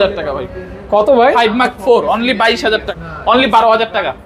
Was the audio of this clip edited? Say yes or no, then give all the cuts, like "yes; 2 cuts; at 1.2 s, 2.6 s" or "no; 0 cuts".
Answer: yes; 1 cut; at 2.9 s